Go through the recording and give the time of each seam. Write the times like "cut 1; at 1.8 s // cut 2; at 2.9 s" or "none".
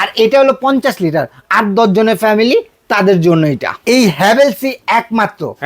cut 1; at 3.7 s